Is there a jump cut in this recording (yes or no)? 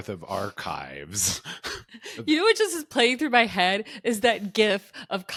no